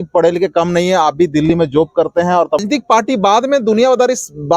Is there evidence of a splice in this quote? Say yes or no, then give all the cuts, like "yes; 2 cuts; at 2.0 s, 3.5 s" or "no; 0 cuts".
yes; 1 cut; at 2.6 s